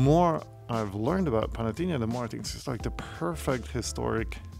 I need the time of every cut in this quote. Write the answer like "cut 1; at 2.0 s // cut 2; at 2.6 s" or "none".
none